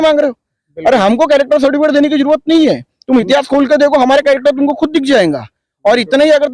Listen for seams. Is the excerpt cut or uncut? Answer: uncut